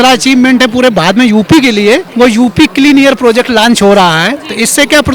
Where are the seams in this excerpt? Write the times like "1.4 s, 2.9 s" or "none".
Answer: 2.1 s